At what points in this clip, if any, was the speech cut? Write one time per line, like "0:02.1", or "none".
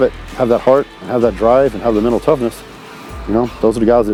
none